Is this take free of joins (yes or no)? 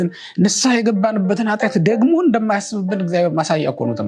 yes